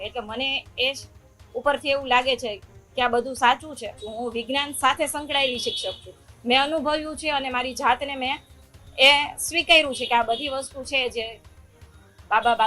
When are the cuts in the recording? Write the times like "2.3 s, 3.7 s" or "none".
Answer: 4.0 s

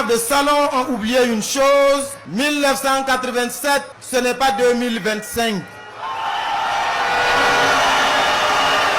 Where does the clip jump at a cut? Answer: 2.2 s, 4.0 s

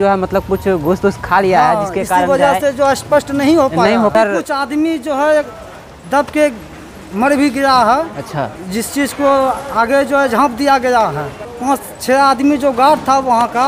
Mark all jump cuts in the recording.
4.1 s, 11.4 s

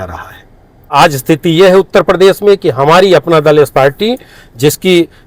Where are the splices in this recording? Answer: 0.9 s

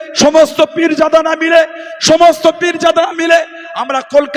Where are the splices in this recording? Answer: none

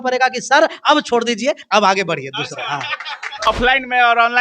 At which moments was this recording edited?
3.5 s

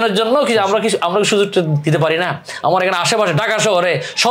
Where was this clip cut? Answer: none

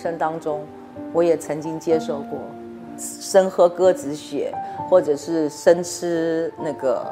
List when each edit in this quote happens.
3.1 s

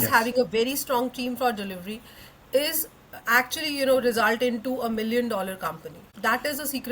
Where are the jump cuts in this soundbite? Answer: 6.0 s

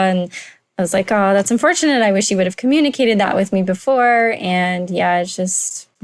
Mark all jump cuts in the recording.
none

